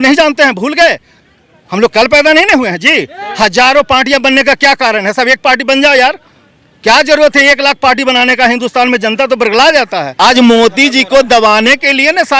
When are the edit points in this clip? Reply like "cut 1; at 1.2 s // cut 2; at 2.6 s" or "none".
cut 1; at 10.0 s